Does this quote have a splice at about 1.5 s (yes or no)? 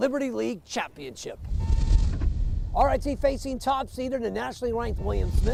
no